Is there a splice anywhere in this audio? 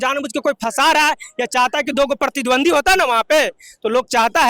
no; 0 cuts

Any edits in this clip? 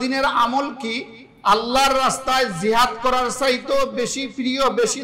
no; 0 cuts

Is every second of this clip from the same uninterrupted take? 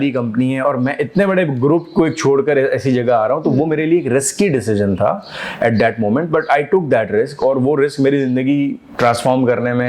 yes; 0 cuts

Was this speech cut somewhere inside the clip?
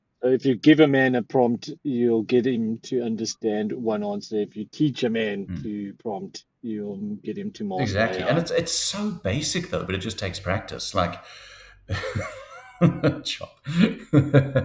no; 0 cuts

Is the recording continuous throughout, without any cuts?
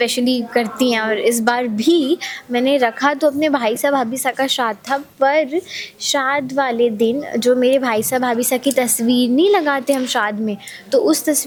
yes; 0 cuts

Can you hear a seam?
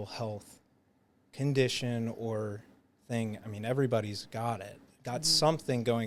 no; 0 cuts

